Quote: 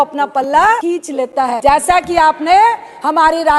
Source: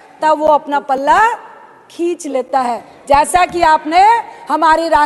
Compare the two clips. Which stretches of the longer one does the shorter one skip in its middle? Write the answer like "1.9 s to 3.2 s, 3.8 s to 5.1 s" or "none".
1.9 s to 2.8 s